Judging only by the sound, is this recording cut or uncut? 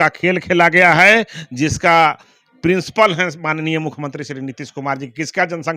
uncut